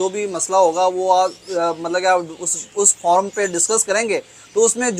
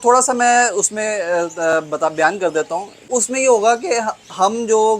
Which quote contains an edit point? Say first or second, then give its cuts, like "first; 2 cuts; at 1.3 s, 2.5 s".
second; 1 cut; at 3.1 s